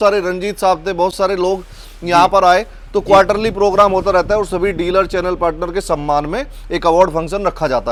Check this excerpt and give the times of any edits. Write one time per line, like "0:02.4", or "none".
none